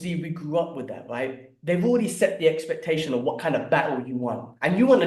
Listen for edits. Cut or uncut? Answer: uncut